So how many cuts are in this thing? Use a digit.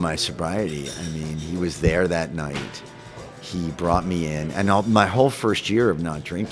0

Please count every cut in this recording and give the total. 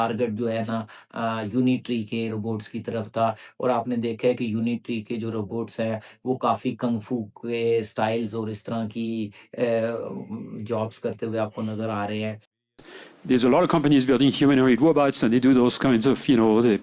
1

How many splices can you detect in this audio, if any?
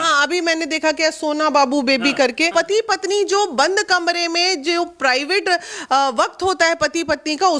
1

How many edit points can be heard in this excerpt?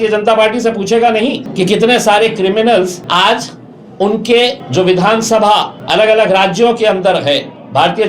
4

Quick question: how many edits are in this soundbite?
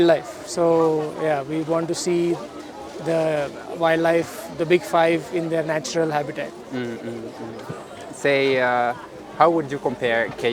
0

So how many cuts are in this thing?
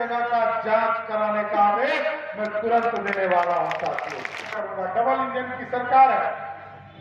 1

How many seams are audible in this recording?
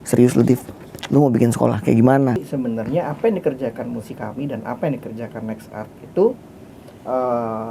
1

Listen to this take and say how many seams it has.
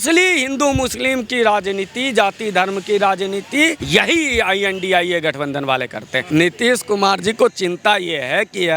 2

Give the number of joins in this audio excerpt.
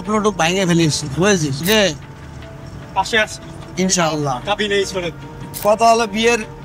1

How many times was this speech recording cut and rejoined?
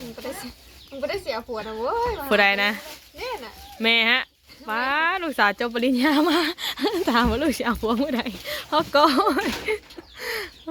0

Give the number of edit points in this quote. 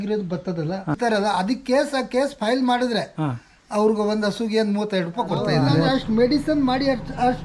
2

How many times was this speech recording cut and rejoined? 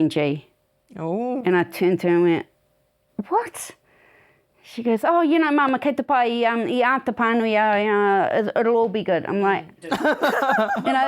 1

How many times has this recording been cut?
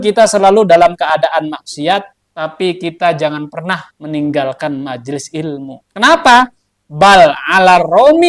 3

